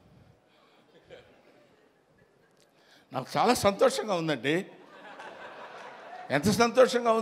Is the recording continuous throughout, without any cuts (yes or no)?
yes